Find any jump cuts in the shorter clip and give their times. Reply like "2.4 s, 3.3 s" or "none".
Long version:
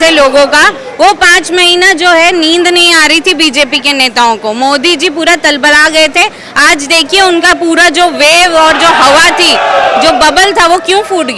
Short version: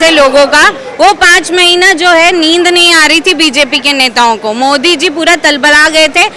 none